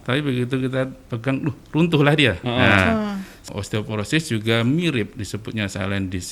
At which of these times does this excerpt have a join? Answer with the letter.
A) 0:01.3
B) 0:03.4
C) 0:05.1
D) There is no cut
B